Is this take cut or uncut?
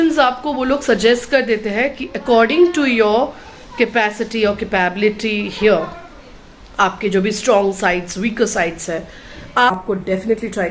cut